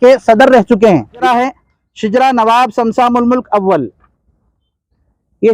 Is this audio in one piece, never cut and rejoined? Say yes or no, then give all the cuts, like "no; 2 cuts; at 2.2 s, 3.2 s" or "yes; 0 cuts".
no; 1 cut; at 1.2 s